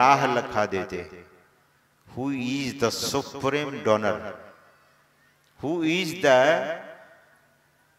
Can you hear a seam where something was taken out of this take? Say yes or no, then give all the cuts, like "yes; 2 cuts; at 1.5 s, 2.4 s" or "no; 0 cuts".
no; 0 cuts